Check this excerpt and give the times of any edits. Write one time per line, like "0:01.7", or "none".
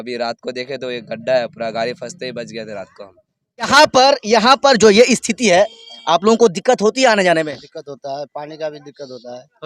0:03.7

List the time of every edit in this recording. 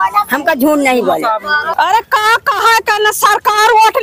0:01.7

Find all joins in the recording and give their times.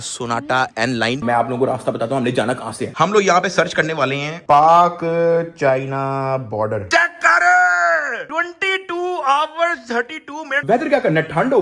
0:01.2
0:06.8
0:10.5

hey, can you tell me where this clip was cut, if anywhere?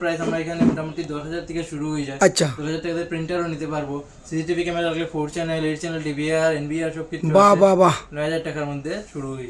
none

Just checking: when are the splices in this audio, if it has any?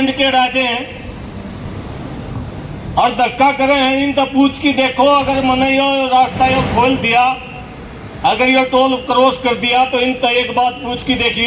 none

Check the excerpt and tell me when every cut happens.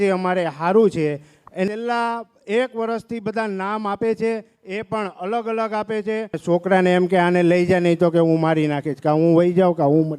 0:01.7
0:06.3

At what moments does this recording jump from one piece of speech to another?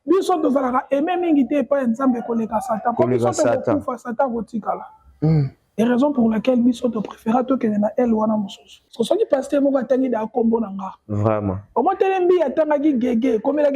0:08.8

